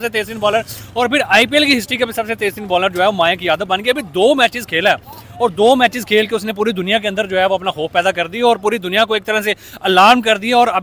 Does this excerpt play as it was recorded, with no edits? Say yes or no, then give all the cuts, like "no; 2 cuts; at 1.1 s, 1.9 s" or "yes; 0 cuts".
yes; 0 cuts